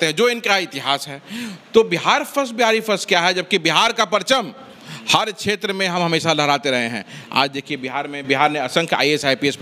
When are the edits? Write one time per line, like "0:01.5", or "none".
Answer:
none